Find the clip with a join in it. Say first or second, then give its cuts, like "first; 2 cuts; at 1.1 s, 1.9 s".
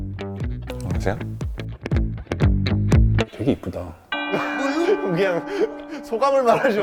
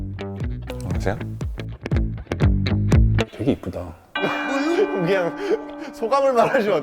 second; 1 cut; at 4.0 s